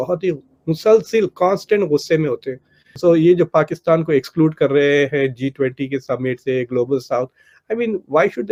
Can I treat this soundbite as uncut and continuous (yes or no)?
yes